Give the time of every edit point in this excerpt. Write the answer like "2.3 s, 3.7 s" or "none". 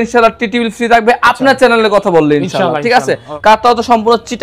none